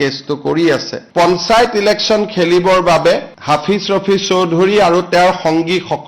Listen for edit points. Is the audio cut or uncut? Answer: cut